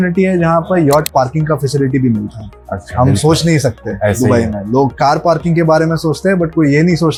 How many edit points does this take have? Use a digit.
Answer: 0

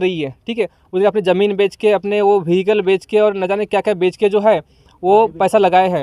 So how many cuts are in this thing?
0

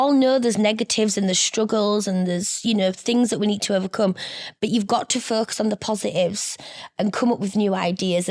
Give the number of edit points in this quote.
0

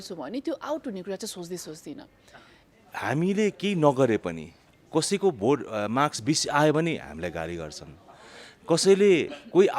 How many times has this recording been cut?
1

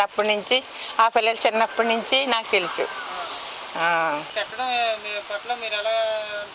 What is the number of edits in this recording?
1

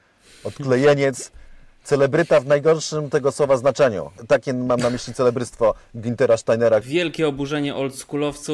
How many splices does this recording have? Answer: 2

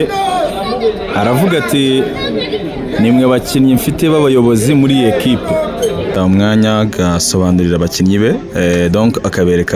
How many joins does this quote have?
1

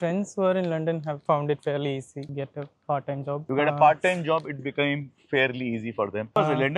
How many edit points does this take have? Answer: 0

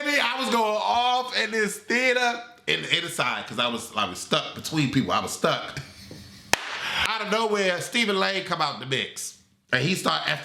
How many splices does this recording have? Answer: 1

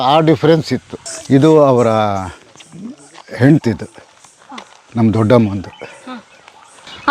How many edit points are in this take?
1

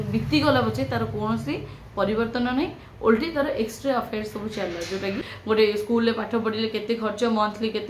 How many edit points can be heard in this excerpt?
1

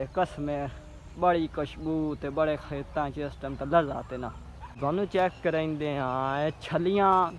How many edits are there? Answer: 1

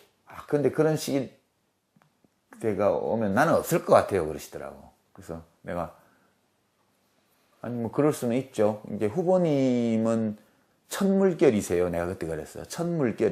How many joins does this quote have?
1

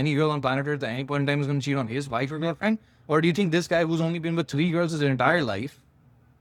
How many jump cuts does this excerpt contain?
0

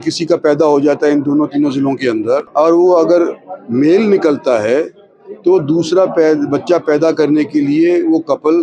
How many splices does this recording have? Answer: 1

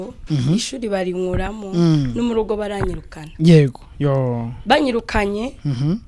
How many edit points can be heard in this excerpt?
0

